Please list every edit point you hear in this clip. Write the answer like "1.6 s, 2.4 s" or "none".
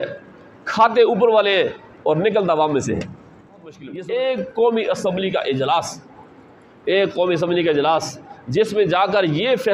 3.8 s